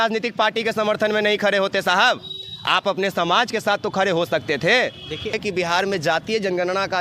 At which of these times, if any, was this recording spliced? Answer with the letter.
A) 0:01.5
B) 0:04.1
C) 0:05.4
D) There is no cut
C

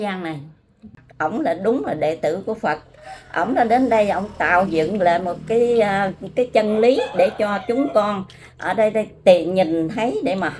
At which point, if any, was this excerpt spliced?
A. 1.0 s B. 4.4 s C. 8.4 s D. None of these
A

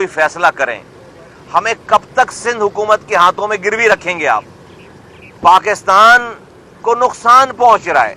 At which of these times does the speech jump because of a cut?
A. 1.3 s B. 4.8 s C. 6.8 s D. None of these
D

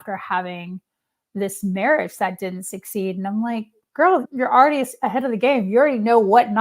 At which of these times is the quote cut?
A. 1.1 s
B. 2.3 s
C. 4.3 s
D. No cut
C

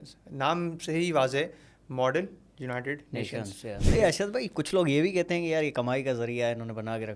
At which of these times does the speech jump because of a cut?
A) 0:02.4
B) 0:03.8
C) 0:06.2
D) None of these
B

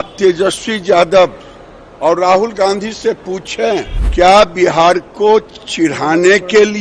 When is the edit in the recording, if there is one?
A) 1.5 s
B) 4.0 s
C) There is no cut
B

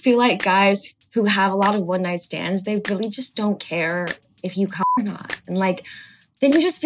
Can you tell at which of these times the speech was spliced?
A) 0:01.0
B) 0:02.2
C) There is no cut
A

